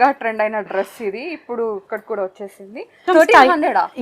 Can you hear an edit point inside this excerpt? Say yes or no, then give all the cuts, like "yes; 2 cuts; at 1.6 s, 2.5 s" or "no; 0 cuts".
yes; 1 cut; at 3.0 s